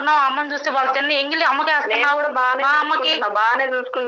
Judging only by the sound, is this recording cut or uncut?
uncut